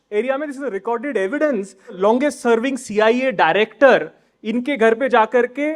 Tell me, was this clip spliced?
yes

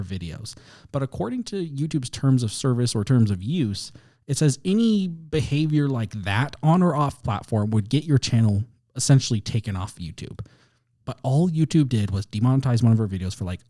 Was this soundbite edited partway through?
no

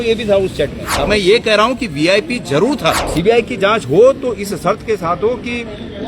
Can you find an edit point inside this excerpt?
yes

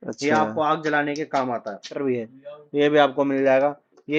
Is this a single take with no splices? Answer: no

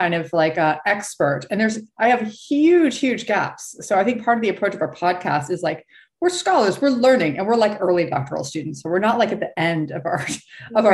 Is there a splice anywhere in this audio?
no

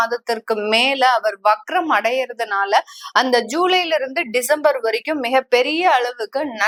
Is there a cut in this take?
no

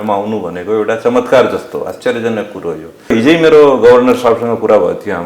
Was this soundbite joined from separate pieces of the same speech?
yes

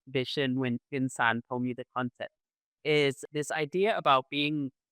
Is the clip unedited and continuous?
no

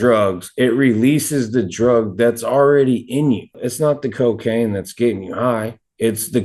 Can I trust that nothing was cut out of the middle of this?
yes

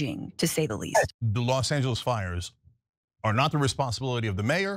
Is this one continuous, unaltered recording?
no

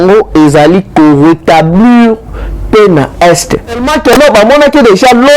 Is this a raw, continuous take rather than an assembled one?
no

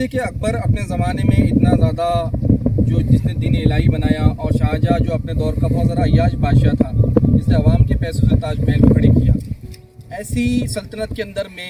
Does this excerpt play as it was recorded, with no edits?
yes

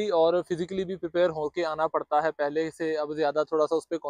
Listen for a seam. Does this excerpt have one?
no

